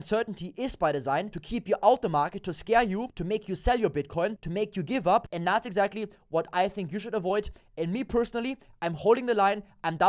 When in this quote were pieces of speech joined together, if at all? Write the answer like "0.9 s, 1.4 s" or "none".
1.4 s, 3.1 s, 4.4 s, 5.3 s